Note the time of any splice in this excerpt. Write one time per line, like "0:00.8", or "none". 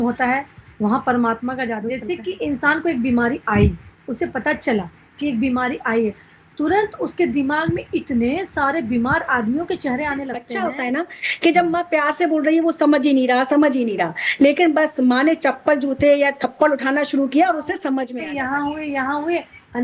0:01.9
0:10.6
0:18.2